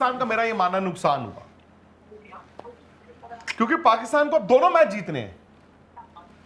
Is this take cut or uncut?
uncut